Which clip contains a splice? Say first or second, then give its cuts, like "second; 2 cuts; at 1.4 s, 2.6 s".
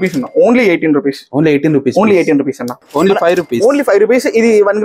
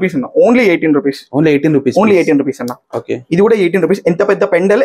first; 1 cut; at 2.8 s